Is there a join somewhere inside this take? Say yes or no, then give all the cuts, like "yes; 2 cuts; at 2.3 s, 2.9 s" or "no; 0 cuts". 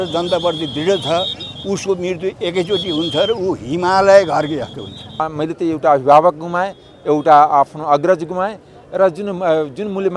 yes; 1 cut; at 5.3 s